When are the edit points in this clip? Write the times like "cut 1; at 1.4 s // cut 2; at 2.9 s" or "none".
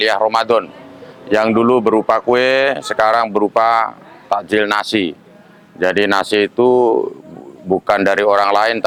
none